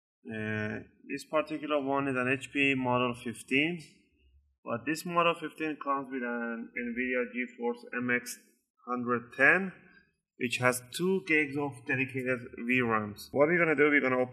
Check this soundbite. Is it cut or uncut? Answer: cut